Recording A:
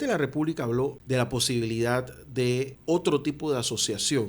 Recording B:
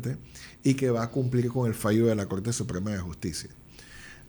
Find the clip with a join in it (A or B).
A